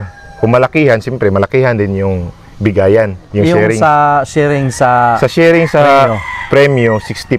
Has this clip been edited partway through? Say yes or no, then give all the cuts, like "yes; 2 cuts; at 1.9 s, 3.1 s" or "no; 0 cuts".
no; 0 cuts